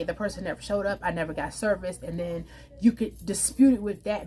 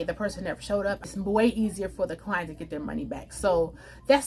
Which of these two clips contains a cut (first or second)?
second